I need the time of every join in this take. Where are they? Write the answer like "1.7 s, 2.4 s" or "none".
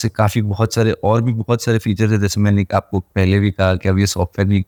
none